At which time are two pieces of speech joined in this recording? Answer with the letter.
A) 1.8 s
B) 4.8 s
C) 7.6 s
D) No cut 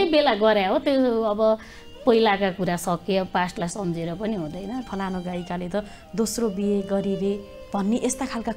B